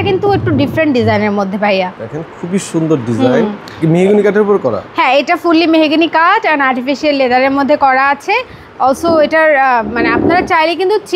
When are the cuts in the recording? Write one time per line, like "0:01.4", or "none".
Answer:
none